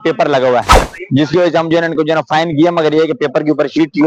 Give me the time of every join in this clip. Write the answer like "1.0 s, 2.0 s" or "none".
none